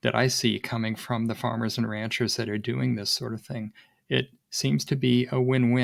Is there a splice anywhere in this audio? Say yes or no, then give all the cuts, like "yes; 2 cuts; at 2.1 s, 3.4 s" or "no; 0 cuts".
no; 0 cuts